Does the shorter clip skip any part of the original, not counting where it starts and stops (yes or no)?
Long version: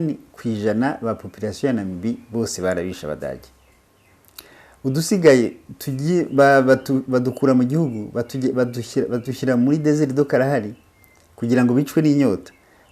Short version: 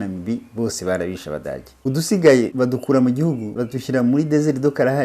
yes